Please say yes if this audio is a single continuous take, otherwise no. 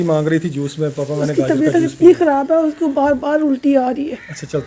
yes